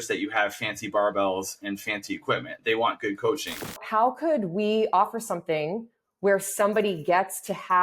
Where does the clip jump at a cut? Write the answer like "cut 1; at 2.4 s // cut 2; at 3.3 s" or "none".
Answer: cut 1; at 3.8 s